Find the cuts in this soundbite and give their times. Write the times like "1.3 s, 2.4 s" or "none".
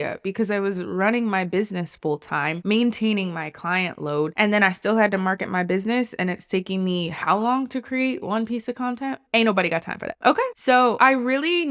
none